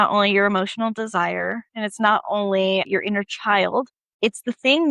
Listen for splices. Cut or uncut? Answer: cut